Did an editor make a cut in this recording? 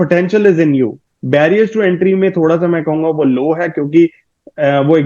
yes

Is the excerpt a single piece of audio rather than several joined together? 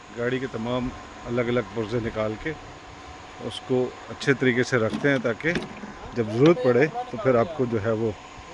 yes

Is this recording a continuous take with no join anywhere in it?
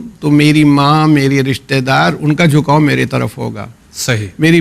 yes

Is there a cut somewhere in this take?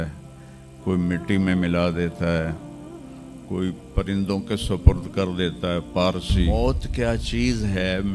yes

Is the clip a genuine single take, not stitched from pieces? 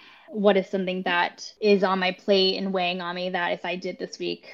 no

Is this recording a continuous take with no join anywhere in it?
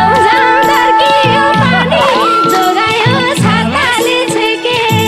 yes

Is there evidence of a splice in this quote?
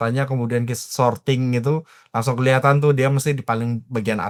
no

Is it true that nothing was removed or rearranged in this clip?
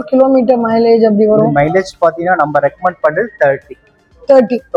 yes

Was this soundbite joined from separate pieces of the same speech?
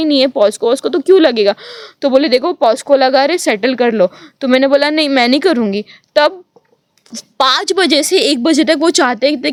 no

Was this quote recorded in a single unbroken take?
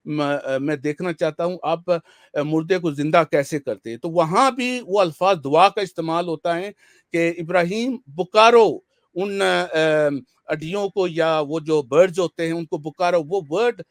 yes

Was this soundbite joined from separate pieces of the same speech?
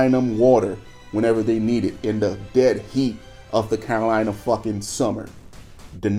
no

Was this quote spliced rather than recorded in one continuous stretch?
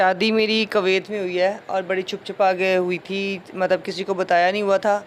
no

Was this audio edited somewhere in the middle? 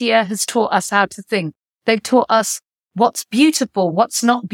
no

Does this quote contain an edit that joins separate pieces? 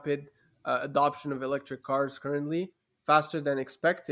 no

